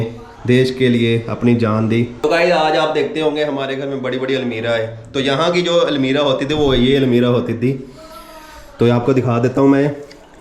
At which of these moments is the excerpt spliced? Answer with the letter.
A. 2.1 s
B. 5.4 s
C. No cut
A